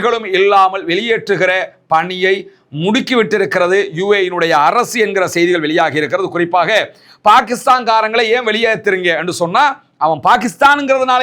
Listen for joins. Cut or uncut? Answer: uncut